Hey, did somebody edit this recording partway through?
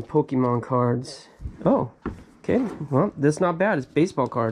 no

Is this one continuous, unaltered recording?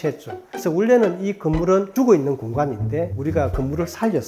yes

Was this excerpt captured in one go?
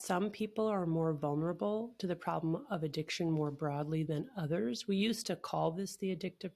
yes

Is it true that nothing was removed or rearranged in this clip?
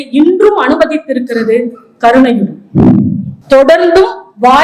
no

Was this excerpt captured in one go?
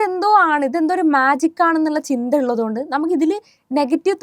yes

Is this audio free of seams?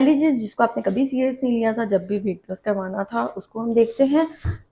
yes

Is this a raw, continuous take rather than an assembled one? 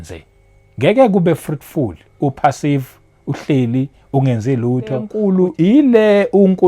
no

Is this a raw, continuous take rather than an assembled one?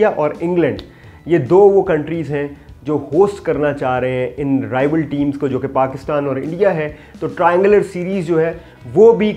yes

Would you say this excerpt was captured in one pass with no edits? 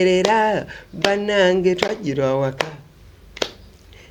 yes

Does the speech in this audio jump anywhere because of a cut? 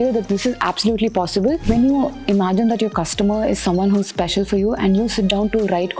yes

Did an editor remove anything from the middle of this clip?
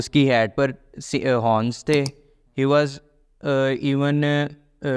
no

